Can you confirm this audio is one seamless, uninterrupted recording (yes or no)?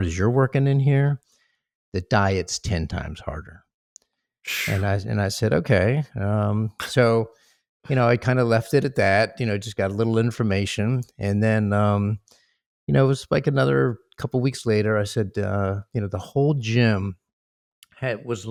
yes